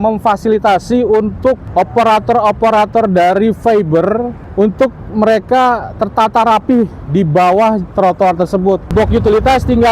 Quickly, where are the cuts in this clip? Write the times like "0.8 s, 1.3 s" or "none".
1.6 s, 4.4 s, 8.9 s